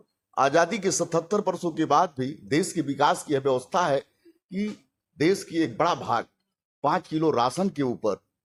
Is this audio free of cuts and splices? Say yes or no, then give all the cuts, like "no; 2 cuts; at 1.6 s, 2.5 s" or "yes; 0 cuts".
yes; 0 cuts